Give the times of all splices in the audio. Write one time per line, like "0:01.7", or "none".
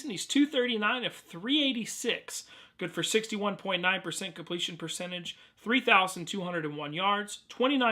0:00.9